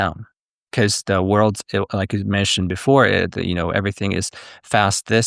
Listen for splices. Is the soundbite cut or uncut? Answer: uncut